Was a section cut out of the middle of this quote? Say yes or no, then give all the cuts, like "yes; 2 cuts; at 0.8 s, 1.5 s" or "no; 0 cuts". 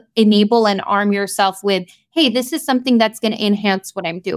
no; 0 cuts